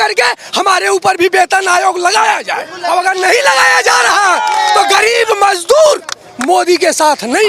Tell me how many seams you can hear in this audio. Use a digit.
0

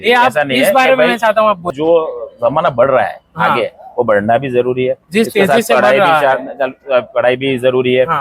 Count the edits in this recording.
1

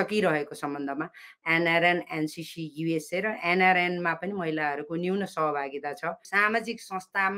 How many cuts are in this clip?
1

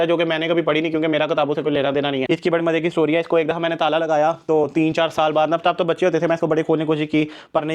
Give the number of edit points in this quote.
1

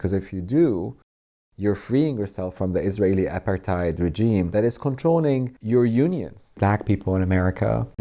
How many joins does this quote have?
3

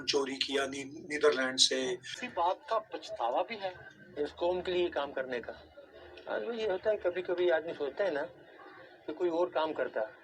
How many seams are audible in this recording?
1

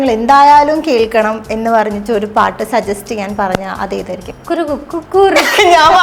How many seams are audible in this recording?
1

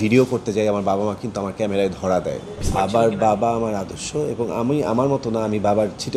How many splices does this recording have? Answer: 1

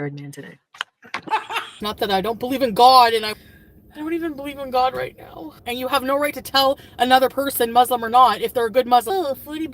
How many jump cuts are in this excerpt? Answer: 2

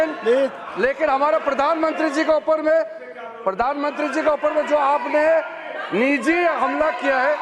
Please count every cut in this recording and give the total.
0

